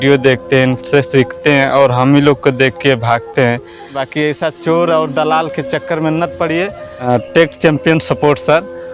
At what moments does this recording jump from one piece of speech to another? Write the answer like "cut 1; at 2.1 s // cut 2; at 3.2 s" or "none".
cut 1; at 4.0 s // cut 2; at 7.0 s